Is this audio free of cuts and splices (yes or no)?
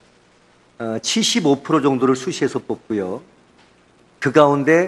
yes